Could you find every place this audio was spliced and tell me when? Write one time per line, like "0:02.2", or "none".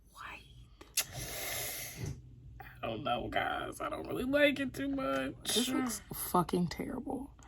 0:01.0
0:05.7